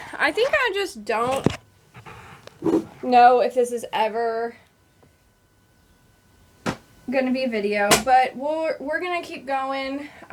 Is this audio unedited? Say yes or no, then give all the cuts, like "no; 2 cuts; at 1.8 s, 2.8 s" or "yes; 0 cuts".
yes; 0 cuts